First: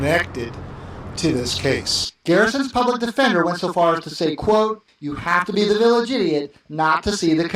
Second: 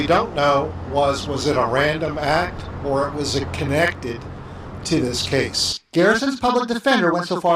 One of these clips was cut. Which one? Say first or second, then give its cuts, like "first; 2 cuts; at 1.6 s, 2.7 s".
first; 1 cut; at 6.6 s